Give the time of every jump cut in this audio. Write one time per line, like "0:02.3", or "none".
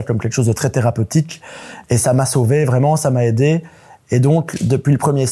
none